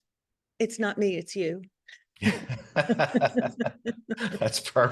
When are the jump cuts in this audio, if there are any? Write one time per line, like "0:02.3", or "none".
none